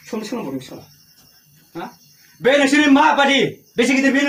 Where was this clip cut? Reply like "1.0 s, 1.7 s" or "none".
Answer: none